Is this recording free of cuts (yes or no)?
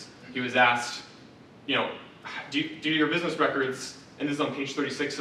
yes